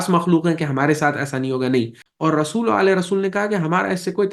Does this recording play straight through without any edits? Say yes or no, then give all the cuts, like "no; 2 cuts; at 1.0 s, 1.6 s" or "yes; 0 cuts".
no; 1 cut; at 2.0 s